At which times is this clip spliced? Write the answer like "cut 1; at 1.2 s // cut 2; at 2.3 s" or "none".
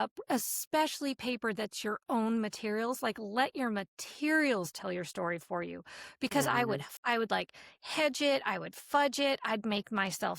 cut 1; at 6.9 s